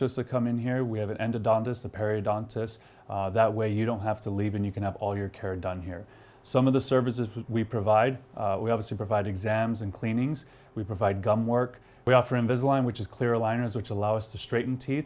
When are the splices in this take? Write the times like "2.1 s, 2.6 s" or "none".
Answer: 11.9 s